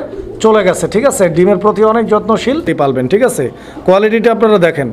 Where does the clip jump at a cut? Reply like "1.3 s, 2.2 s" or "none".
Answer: 2.6 s